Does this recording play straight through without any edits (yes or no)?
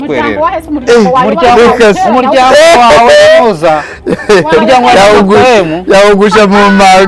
yes